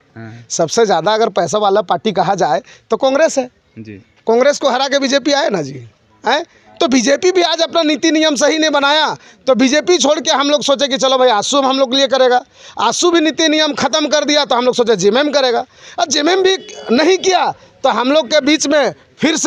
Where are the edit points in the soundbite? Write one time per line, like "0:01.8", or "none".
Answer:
none